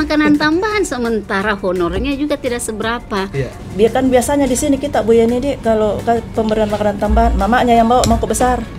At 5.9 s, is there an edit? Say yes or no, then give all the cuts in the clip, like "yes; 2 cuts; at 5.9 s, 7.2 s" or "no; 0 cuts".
no; 1 cut; at 3.6 s